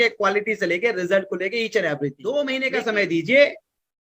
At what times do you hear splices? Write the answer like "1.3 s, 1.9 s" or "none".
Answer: 2.4 s

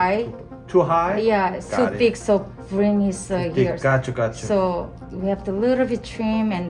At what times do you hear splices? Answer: none

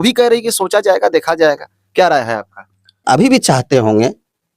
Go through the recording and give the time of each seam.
3.0 s

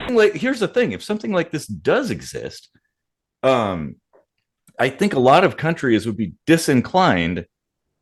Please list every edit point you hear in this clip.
none

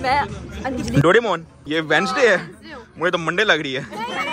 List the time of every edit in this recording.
1.6 s

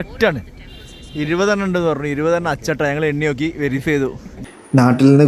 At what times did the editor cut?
4.3 s

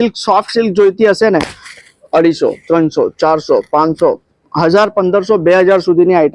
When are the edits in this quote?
none

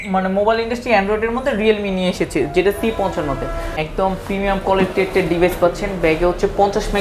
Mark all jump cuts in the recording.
3.7 s

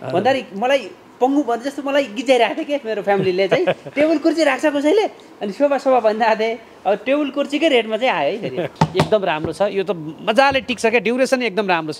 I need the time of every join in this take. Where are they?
8.7 s

